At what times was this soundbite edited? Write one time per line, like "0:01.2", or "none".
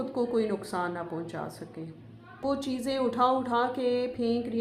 0:02.4

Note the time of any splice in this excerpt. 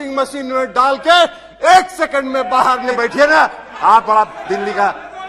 0:03.0

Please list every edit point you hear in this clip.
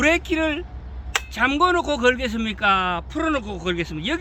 none

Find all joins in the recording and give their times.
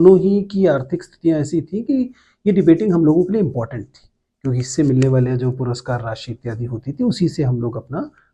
none

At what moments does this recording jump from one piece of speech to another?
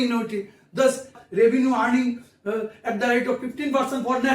0:01.2

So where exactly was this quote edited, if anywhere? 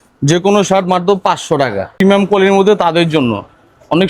0:01.9

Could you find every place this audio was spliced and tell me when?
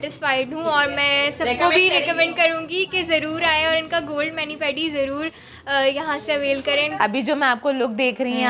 0:07.0

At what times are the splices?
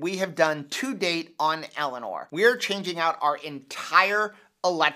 0:02.2

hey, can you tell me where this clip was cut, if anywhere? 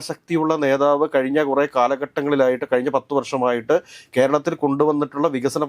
none

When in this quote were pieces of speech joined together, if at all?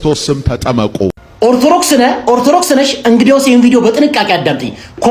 0:01.3

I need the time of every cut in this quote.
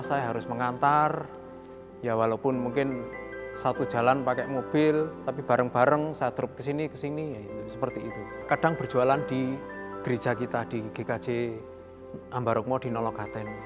0:08.4

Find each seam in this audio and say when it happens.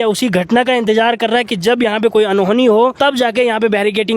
0:02.9

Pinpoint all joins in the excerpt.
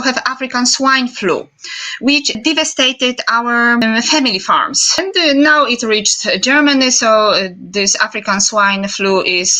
0:02.4
0:03.8
0:04.9

